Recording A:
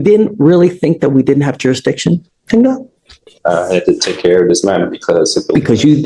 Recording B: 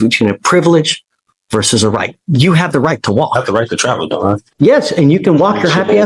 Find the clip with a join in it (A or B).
B